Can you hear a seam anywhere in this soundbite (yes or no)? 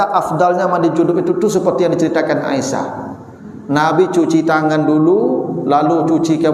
no